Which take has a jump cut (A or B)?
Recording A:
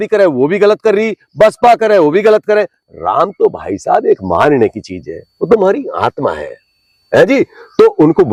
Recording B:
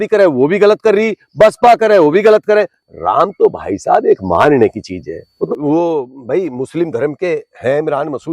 B